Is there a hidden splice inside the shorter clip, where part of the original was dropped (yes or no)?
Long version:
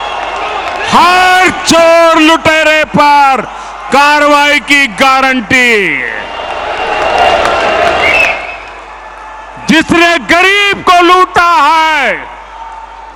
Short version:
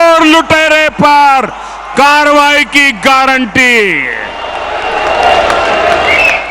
no